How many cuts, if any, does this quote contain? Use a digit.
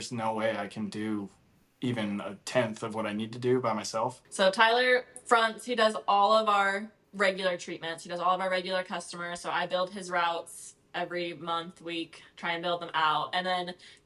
2